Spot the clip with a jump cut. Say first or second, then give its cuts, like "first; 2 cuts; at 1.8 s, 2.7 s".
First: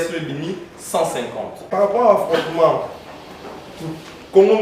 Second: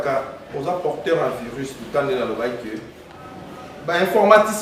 first; 1 cut; at 1.7 s